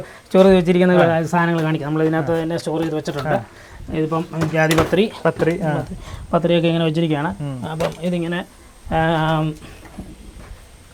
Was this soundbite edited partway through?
no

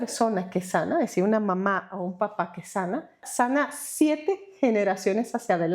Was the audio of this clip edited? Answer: yes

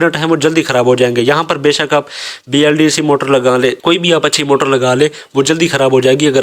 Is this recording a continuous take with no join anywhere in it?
yes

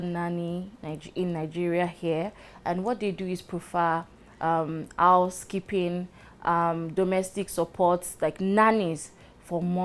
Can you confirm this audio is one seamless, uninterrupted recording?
yes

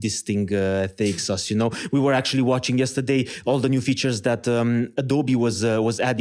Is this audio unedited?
yes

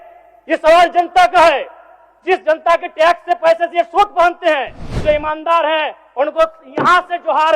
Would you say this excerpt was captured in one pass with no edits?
no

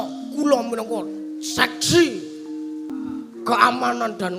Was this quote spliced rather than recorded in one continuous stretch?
yes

